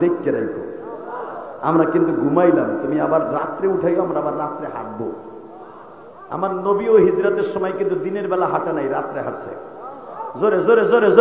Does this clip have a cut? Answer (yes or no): no